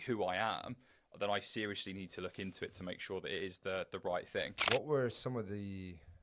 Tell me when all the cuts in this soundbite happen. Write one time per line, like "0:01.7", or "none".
0:04.6